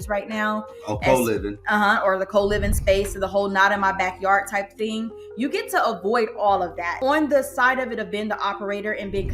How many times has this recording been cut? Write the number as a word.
one